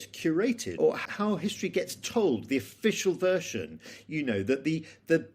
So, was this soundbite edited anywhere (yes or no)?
yes